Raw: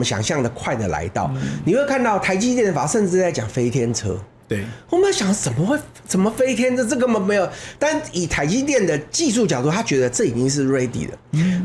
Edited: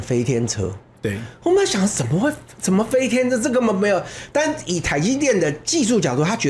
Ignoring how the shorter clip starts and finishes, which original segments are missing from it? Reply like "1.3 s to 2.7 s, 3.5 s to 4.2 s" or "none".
none